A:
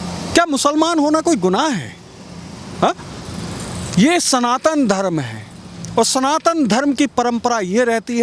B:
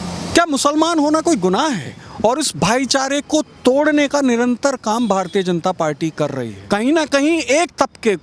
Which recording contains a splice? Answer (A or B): B